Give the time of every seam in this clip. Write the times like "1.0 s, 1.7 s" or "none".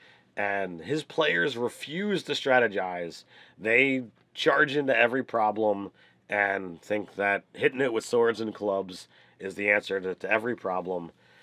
2.0 s